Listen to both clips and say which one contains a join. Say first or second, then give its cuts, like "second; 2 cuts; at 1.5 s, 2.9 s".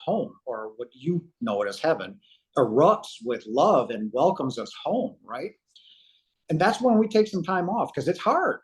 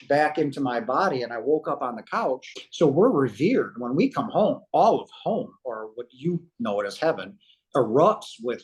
second; 1 cut; at 2.6 s